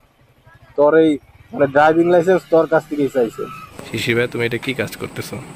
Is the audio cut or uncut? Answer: cut